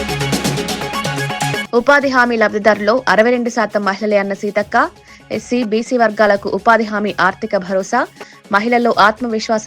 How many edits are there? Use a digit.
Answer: 1